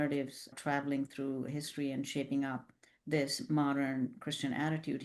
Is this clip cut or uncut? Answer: uncut